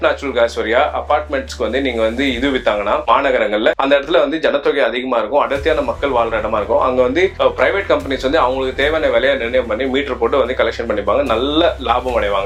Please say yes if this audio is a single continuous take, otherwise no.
yes